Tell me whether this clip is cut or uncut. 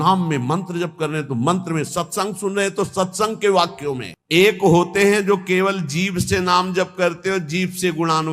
cut